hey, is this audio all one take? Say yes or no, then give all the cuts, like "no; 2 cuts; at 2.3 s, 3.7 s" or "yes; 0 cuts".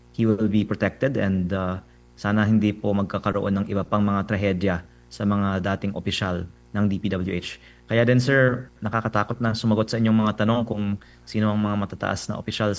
yes; 0 cuts